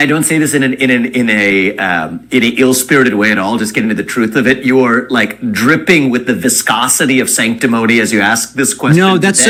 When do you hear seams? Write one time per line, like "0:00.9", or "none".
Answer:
none